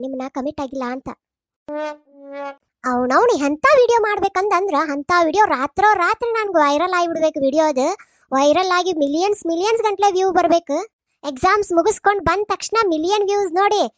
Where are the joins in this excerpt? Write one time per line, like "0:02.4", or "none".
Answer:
0:02.6